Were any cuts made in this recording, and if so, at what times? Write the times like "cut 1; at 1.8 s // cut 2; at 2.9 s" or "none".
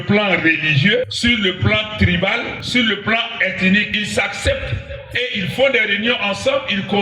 cut 1; at 1.1 s // cut 2; at 2.6 s // cut 3; at 3.9 s